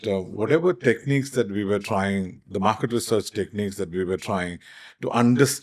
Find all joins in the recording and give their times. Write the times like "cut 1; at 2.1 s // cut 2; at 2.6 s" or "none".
none